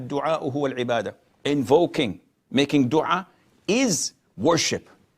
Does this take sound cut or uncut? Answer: cut